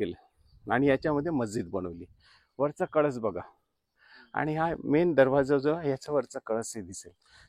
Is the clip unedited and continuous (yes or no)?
yes